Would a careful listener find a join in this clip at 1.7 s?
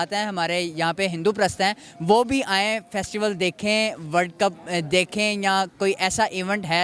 no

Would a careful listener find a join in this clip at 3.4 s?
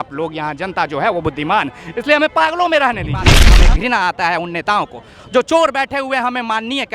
yes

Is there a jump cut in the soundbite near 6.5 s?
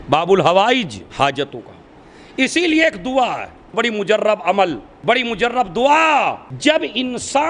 yes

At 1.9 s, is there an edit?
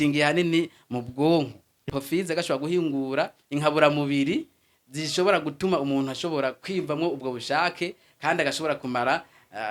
yes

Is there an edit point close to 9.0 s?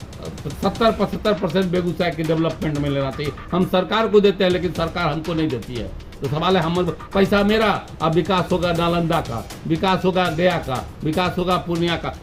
no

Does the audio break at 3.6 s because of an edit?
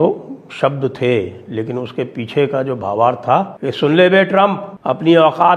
yes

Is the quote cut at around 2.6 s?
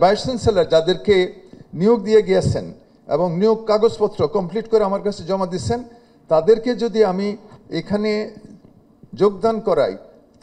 no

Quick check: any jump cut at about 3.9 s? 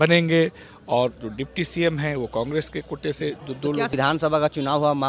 yes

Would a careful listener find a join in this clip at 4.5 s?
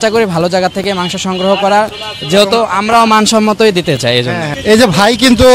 yes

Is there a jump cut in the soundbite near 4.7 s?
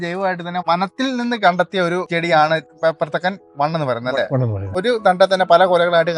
yes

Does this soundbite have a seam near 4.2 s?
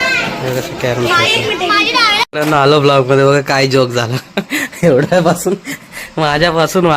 no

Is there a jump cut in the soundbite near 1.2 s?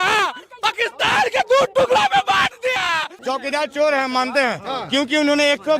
no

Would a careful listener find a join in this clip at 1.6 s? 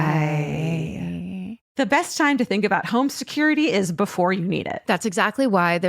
yes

